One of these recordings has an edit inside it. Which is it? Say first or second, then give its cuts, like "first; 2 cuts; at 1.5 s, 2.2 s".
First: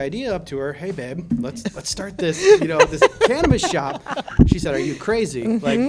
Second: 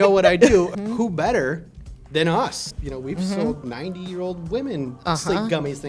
second; 2 cuts; at 0.7 s, 2.7 s